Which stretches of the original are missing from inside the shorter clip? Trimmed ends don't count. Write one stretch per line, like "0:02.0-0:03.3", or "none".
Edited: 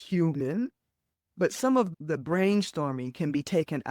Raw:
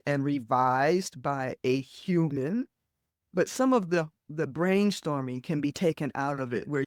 0:03.9-0:04.2

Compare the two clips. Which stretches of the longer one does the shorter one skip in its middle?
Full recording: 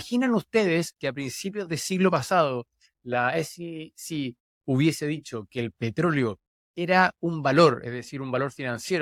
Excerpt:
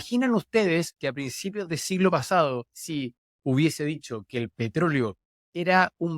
0:02.8-0:04.0

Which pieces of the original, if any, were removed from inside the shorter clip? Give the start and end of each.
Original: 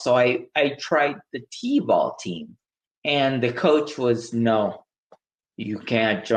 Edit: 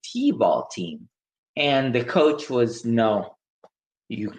none

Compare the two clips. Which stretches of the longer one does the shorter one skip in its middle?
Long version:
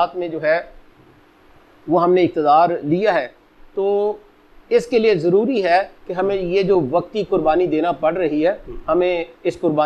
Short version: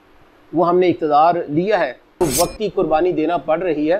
0:03.6-0:06.8

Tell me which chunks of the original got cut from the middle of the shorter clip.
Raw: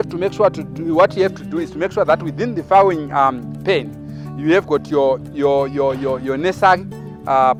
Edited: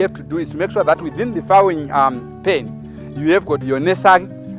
0:04.8-0:06.2

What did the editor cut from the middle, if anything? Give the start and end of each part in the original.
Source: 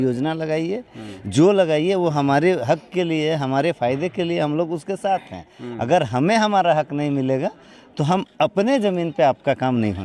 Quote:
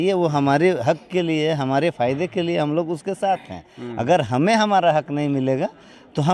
none

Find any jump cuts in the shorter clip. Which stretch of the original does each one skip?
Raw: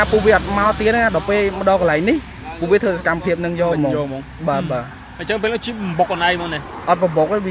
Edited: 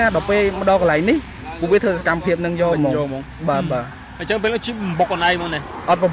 none

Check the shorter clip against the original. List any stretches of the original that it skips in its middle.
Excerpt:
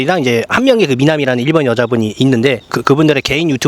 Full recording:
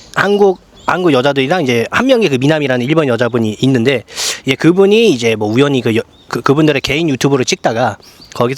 0:04.1-0:06.3

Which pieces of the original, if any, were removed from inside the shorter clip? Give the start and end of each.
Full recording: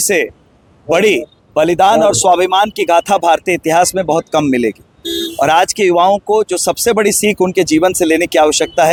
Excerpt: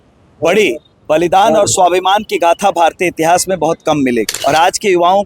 0:04.8-0:05.3

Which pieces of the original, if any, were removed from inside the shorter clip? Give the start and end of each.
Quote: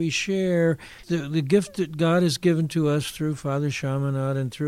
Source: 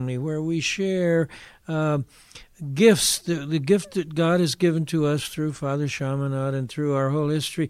0:01.5-0:03.1

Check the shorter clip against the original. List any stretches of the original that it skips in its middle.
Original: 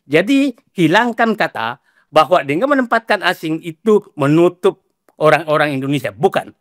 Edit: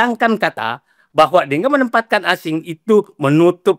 none

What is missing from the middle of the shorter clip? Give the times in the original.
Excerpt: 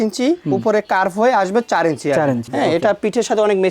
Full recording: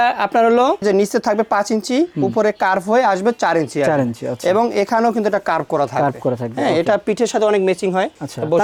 0:04.2-0:06.5

